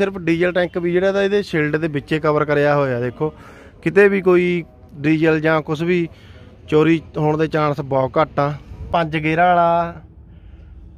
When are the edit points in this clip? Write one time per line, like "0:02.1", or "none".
0:08.9